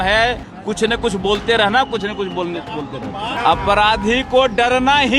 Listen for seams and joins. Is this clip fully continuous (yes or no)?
no